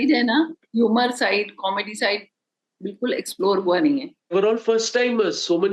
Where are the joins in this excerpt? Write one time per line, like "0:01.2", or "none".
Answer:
0:04.3